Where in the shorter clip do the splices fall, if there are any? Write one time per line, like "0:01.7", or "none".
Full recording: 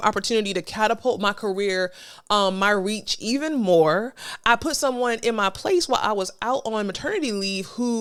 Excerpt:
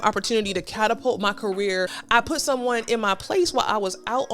0:02.0